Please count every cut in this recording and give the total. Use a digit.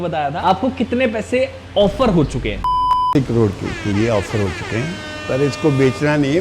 0